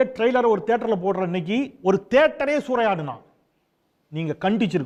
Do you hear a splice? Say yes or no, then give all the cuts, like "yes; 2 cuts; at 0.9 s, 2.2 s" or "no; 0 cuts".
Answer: no; 0 cuts